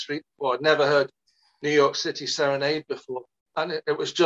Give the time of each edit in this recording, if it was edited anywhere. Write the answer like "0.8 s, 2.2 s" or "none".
3.4 s